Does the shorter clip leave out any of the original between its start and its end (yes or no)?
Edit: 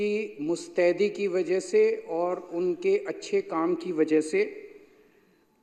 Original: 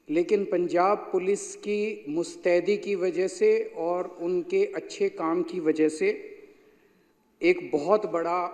no